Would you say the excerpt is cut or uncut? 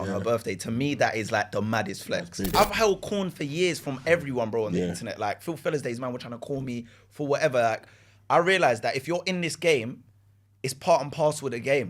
cut